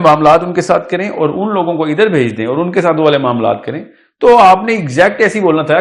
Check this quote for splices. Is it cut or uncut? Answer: uncut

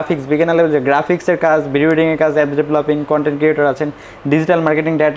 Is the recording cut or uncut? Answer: uncut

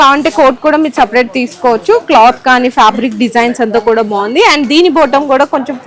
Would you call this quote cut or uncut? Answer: uncut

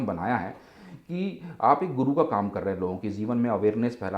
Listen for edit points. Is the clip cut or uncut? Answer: uncut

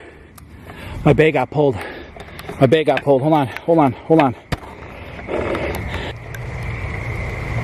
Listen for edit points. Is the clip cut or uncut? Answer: uncut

